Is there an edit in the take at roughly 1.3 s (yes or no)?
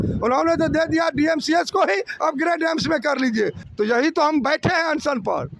no